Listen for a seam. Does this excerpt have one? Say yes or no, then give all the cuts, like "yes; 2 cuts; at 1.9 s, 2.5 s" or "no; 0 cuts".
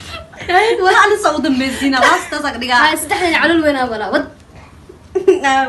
no; 0 cuts